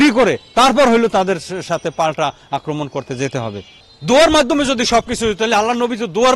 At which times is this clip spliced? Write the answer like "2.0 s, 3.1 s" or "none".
3.7 s